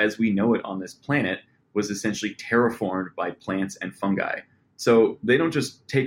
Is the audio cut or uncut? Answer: uncut